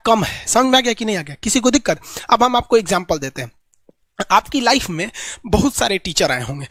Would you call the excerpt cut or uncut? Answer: uncut